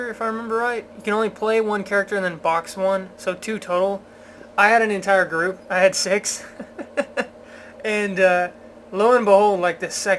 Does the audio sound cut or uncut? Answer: cut